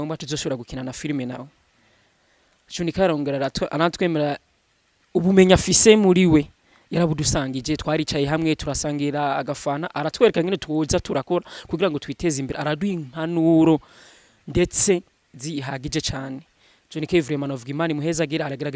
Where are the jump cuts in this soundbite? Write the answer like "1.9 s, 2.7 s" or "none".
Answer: none